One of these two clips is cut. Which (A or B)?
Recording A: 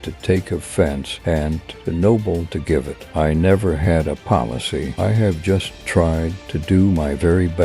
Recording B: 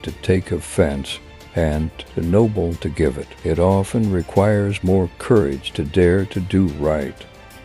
A